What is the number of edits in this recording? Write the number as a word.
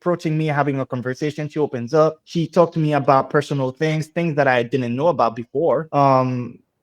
one